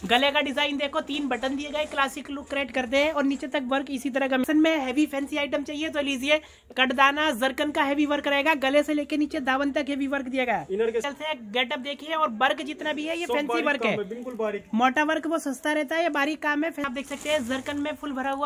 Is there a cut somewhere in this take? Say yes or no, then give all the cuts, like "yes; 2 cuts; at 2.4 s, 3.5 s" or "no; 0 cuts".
yes; 3 cuts; at 4.4 s, 11.0 s, 16.8 s